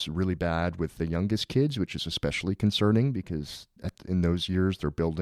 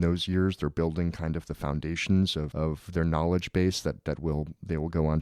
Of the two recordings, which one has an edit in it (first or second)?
second